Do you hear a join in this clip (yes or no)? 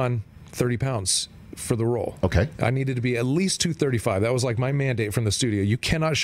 no